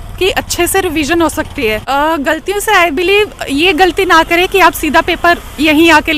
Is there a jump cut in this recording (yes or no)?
yes